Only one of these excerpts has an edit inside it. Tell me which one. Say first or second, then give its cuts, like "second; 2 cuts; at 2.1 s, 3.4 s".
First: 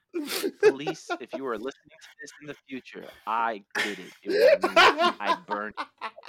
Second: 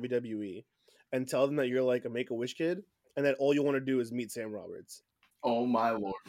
second; 1 cut; at 5.4 s